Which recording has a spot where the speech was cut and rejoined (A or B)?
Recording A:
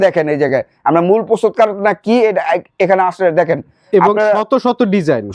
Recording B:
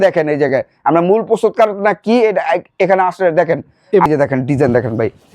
B